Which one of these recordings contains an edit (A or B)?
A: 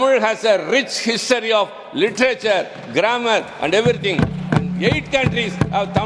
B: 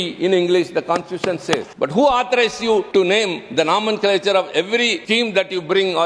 B